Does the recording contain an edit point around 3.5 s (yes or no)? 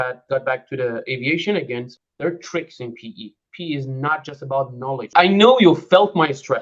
no